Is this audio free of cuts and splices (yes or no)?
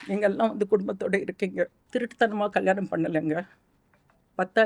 no